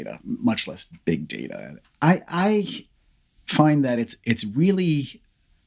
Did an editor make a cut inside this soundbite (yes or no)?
no